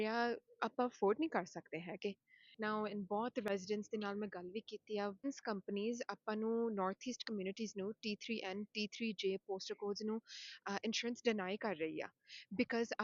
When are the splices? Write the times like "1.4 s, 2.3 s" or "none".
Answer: 5.2 s